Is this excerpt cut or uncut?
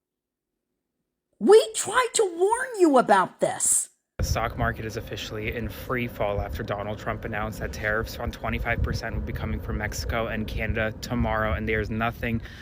cut